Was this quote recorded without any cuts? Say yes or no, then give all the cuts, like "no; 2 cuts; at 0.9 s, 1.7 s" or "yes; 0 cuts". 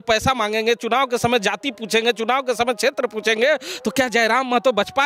yes; 0 cuts